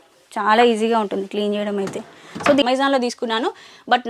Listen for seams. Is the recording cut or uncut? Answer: cut